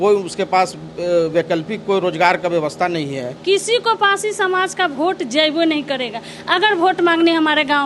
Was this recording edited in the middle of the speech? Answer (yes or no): yes